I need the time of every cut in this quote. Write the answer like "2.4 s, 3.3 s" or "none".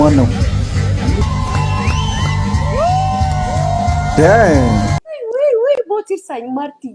1.2 s, 4.8 s

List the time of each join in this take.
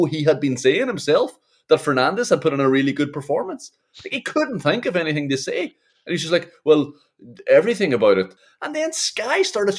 8.4 s

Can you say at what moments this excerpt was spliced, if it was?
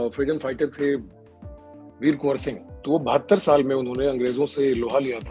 2.7 s

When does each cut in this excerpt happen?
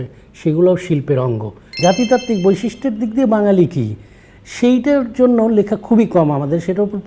1.7 s

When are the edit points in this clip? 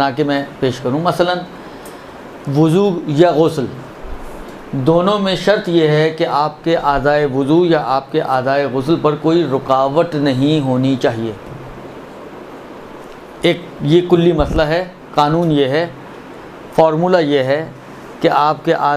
none

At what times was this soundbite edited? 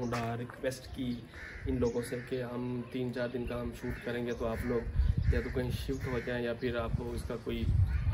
none

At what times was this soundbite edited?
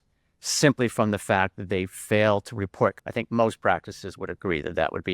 3.0 s

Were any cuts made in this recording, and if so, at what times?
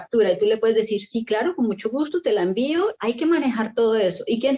3.0 s

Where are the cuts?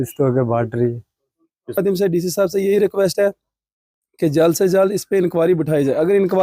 1.8 s

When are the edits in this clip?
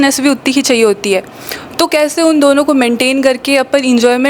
none

